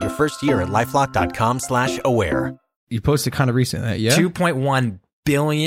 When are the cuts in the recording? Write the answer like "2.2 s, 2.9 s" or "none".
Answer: 2.8 s

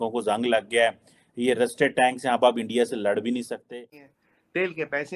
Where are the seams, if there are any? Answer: 3.6 s

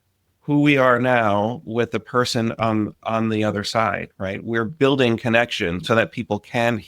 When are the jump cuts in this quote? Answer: 5.8 s

